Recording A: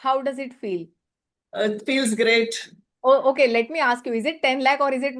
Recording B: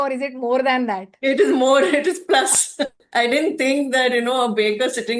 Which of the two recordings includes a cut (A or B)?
B